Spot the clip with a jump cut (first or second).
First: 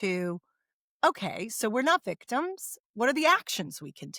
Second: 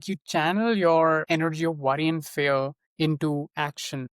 second